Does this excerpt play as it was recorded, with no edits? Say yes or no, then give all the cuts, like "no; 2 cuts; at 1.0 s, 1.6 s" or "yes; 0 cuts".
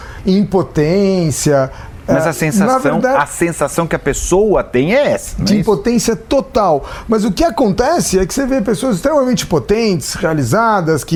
yes; 0 cuts